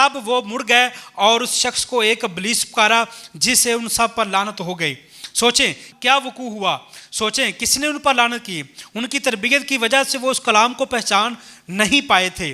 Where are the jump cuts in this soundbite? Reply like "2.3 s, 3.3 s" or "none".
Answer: 5.9 s